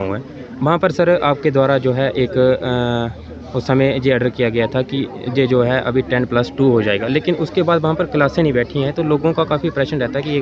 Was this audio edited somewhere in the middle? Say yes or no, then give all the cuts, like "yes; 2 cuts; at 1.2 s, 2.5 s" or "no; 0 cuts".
no; 0 cuts